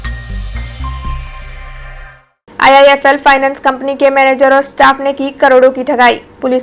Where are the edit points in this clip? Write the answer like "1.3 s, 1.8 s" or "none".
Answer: none